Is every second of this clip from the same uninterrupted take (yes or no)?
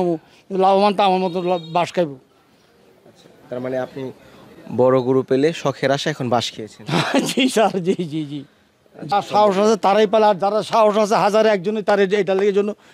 no